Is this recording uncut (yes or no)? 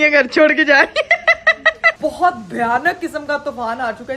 no